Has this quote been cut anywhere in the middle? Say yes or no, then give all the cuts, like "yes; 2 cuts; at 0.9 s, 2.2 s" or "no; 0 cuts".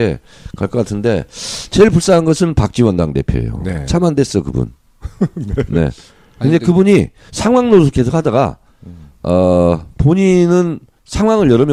no; 0 cuts